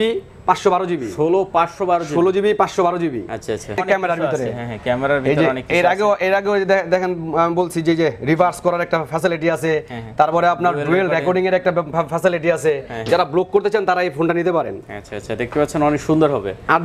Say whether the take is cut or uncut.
cut